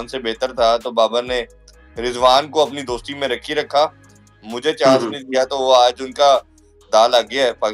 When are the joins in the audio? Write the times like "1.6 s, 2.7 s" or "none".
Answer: none